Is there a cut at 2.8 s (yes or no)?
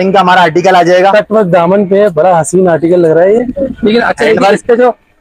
no